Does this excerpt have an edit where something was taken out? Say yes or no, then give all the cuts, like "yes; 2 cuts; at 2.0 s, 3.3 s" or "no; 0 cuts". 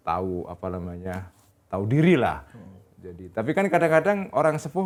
no; 0 cuts